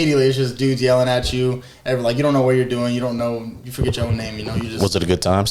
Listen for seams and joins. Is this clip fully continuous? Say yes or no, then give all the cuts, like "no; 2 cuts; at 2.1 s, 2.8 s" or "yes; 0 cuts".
yes; 0 cuts